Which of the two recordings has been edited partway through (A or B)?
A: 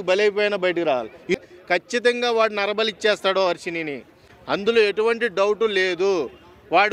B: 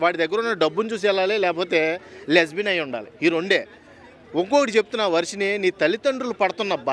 A